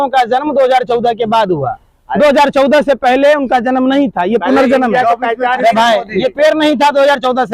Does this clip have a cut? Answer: no; 0 cuts

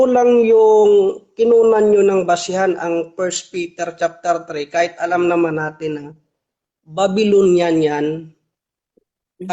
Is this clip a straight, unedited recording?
yes; 0 cuts

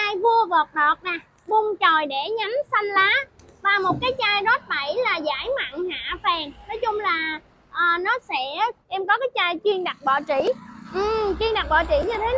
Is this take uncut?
no; 1 cut; at 8.8 s

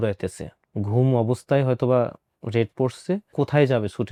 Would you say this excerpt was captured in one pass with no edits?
yes; 0 cuts

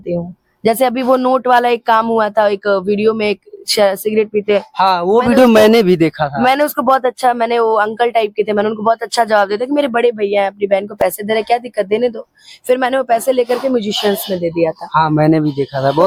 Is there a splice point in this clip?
no; 0 cuts

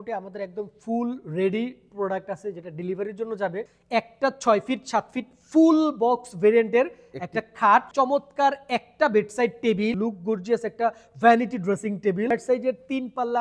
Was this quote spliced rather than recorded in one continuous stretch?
yes; 4 cuts; at 3.7 s, 7.9 s, 9.9 s, 12.3 s

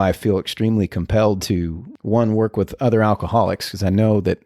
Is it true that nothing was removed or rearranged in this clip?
no; 1 cut; at 1.8 s

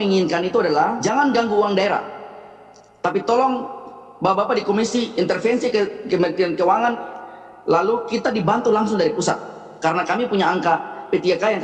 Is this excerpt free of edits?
yes; 0 cuts

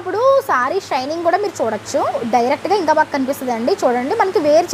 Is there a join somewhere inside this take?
yes; 1 cut; at 2.2 s

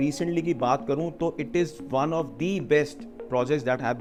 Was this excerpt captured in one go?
yes; 0 cuts

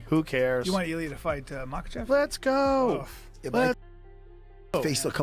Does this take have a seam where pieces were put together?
no; 0 cuts

